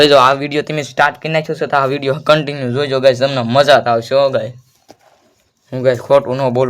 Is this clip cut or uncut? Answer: uncut